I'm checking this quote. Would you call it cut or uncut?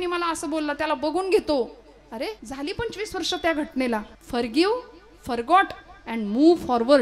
cut